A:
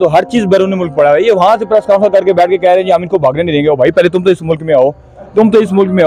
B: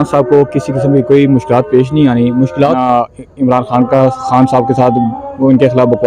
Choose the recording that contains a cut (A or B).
B